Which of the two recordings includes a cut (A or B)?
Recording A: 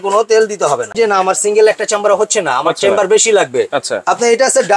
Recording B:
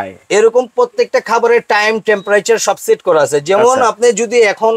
A